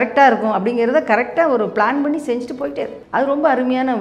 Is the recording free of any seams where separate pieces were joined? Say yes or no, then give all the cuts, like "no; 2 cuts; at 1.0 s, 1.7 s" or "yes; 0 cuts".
no; 1 cut; at 3.0 s